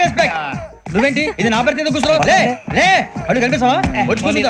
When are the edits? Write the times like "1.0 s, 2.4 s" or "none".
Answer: none